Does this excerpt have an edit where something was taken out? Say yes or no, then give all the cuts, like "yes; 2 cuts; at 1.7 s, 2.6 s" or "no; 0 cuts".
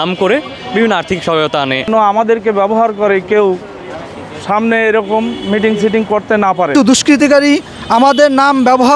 yes; 2 cuts; at 1.8 s, 6.7 s